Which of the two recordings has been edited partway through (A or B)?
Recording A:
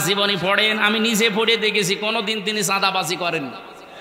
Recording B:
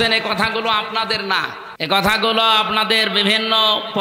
B